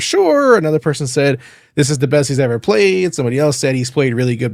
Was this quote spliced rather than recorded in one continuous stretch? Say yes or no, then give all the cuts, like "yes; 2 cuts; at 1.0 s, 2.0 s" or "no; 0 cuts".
no; 0 cuts